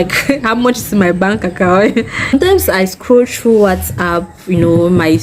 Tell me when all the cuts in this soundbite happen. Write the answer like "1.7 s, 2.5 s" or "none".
2.2 s